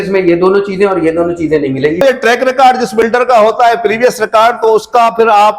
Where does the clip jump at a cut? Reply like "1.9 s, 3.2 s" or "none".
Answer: 2.0 s